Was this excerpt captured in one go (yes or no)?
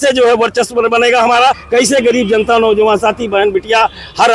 no